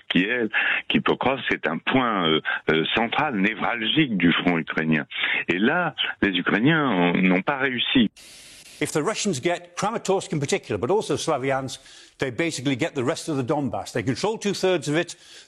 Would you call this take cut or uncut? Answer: cut